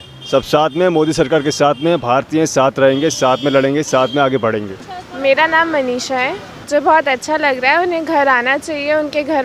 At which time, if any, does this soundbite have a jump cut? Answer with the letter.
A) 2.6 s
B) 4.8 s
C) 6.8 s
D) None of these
B